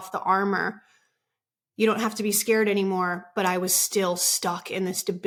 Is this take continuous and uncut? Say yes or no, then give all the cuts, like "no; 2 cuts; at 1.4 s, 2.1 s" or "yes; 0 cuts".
yes; 0 cuts